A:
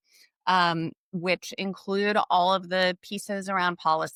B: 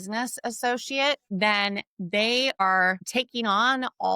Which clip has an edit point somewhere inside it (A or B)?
B